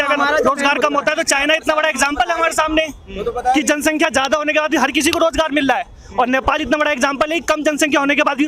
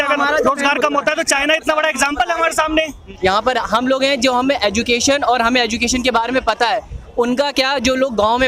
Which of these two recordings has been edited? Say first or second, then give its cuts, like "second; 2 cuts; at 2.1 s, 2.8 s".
second; 1 cut; at 3.0 s